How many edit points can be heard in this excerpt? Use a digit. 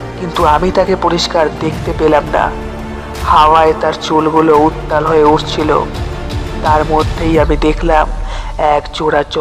1